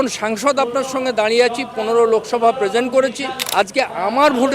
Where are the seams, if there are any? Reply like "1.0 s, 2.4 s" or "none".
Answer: none